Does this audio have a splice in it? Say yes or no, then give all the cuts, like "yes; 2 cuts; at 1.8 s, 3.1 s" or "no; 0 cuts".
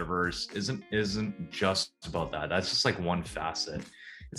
no; 0 cuts